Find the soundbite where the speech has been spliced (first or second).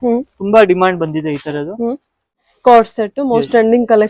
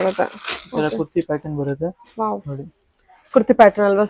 first